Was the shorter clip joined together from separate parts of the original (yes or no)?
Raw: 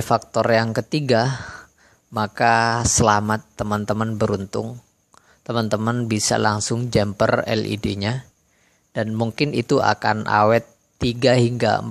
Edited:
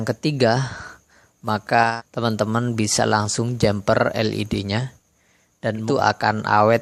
yes